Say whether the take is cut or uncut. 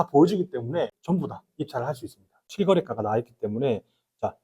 cut